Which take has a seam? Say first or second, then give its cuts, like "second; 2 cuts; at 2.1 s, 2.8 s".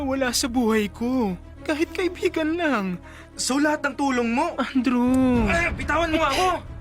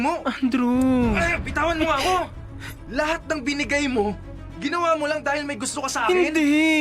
first; 1 cut; at 1.5 s